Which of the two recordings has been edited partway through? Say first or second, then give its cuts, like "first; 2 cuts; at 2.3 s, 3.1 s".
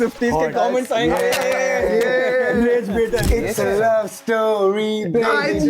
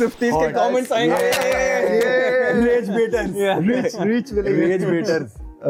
first; 1 cut; at 3.3 s